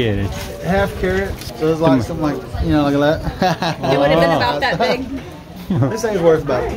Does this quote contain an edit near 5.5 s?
yes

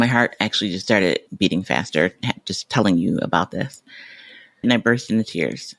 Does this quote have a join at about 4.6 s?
yes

